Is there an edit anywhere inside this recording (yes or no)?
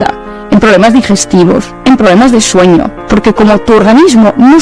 yes